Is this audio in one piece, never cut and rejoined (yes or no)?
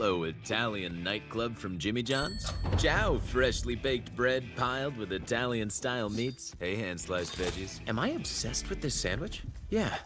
yes